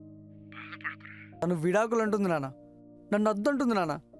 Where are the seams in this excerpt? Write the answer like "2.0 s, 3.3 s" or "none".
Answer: 1.4 s